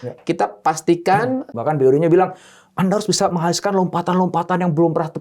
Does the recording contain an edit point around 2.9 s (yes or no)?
no